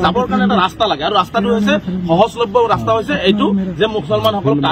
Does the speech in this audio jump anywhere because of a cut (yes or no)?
no